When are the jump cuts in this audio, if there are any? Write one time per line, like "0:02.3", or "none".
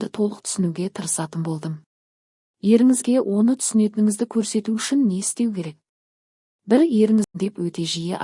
0:07.3